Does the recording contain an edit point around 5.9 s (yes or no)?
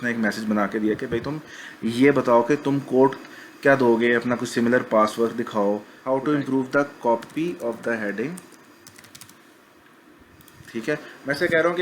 yes